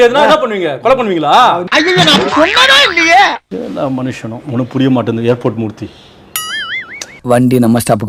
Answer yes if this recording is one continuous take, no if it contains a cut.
yes